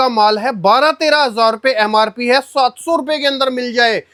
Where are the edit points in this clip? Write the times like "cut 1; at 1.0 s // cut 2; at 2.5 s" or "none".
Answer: none